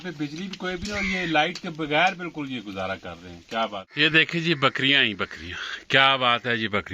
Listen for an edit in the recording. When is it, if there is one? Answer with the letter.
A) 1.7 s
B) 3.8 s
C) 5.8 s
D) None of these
B